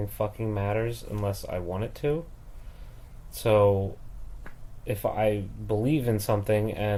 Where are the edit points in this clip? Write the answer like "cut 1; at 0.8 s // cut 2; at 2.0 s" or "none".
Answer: none